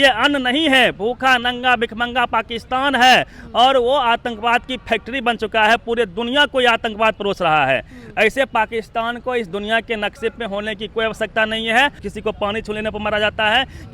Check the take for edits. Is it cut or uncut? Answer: cut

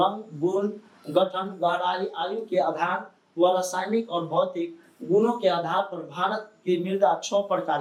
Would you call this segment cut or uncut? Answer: uncut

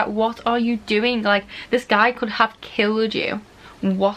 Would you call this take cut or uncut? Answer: uncut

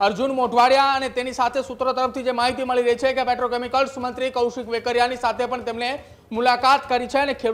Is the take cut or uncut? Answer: uncut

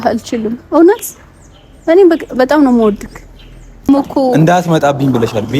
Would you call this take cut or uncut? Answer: cut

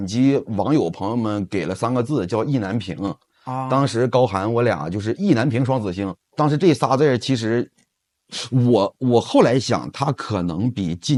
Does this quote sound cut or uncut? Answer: uncut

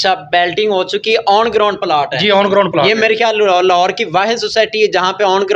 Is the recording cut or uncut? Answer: uncut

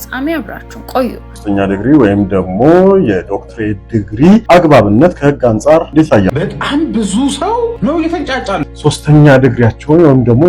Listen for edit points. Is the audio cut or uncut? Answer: cut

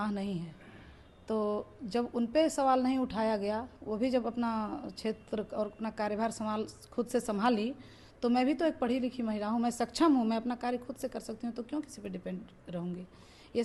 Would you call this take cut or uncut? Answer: uncut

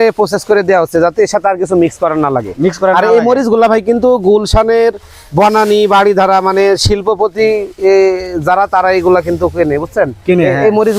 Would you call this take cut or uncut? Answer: uncut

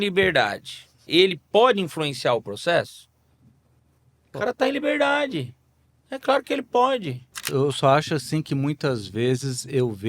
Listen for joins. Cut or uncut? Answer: cut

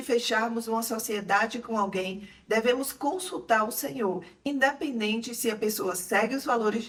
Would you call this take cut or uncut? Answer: uncut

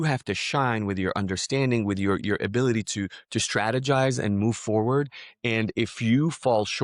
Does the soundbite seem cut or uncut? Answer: uncut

